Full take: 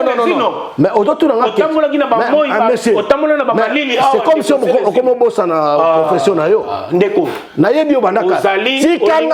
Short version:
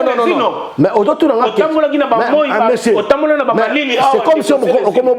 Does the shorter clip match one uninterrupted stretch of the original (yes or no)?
yes